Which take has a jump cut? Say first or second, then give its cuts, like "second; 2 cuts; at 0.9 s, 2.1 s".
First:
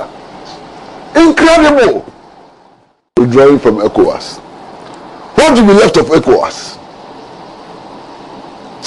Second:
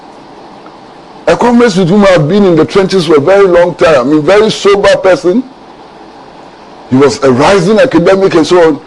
first; 1 cut; at 3.2 s